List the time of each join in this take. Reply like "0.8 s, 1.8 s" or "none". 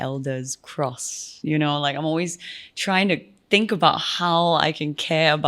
1.2 s